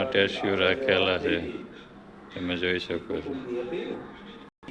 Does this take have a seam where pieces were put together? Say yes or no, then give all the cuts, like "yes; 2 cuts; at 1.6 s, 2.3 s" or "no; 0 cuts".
no; 0 cuts